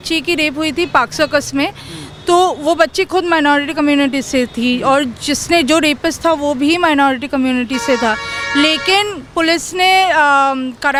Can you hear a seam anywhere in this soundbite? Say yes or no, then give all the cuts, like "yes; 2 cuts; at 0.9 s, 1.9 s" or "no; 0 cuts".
no; 0 cuts